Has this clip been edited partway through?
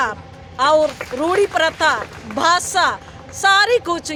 no; 0 cuts

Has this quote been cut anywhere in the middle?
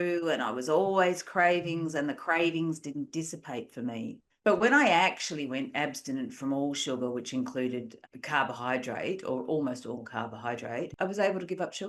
yes; 1 cut; at 10.9 s

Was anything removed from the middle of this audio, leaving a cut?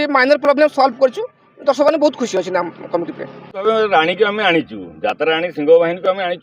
yes; 1 cut; at 3.6 s

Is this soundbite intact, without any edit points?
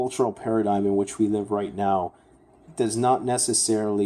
yes; 0 cuts

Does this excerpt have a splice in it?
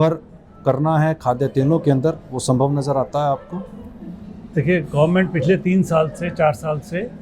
no; 0 cuts

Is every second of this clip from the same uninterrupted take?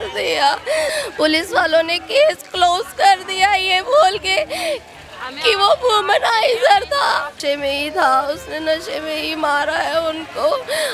no; 2 cuts; at 1.0 s, 7.4 s

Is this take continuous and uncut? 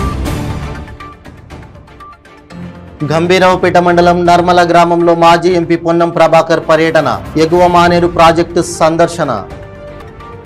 no; 1 cut; at 2.9 s

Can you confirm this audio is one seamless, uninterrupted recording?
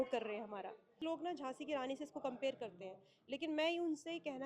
no; 1 cut; at 0.9 s

